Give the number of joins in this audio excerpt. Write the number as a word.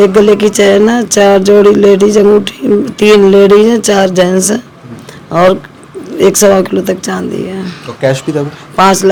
zero